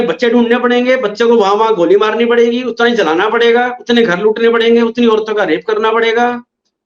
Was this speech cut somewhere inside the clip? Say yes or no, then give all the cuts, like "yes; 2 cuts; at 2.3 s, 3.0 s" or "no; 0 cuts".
no; 0 cuts